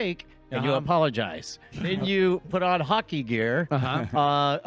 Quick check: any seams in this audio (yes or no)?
yes